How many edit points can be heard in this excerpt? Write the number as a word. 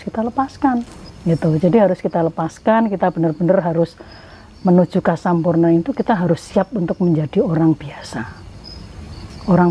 one